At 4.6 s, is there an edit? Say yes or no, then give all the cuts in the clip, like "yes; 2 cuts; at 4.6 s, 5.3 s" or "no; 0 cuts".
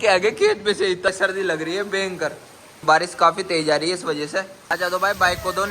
yes; 3 cuts; at 1.1 s, 2.8 s, 4.6 s